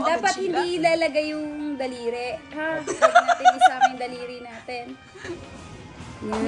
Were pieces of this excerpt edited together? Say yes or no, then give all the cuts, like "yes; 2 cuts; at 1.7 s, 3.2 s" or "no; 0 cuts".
no; 0 cuts